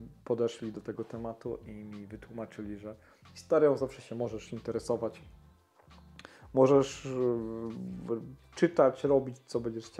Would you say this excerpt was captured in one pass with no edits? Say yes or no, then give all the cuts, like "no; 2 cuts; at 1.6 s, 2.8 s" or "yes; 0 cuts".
yes; 0 cuts